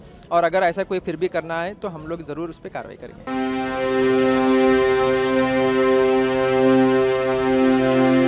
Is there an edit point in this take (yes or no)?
yes